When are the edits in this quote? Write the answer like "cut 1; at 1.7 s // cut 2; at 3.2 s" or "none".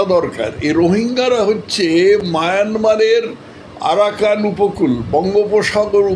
none

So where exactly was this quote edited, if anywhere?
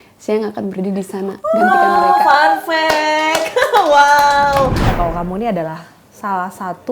cut 1; at 4.9 s

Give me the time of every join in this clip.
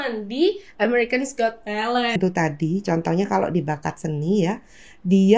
cut 1; at 2.1 s

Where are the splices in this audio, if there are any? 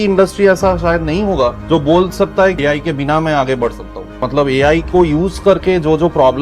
cut 1; at 1.6 s // cut 2; at 2.6 s // cut 3; at 4.2 s

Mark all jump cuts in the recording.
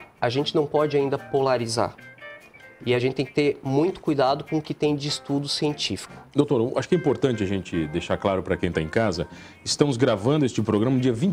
none

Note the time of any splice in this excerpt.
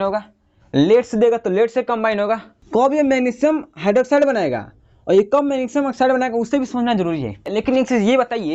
cut 1; at 2.5 s // cut 2; at 7.5 s

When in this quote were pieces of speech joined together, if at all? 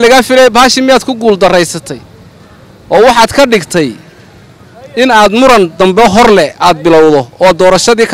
none

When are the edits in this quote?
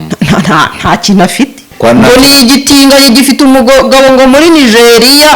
cut 1; at 1.7 s

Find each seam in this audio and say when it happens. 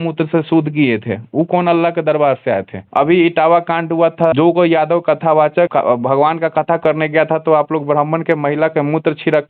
cut 1; at 4.3 s // cut 2; at 5.7 s

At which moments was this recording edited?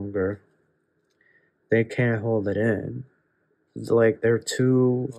none

